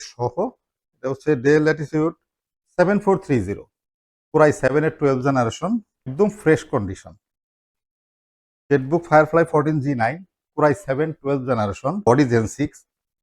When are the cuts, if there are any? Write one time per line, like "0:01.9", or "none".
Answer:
0:00.9
0:06.1
0:12.0